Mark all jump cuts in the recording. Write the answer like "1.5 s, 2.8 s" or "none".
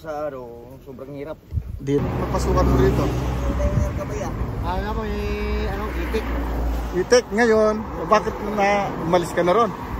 2.0 s